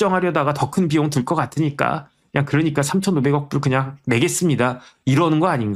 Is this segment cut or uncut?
uncut